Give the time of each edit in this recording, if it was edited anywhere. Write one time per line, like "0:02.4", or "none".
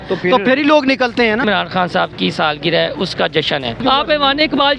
0:01.4
0:03.8